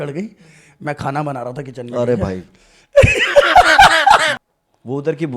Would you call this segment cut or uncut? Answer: cut